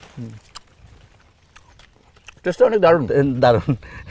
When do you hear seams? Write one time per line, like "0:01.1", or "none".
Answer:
none